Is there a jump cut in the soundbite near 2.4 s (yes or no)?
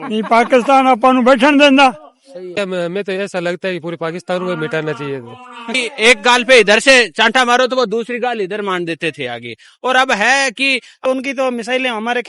yes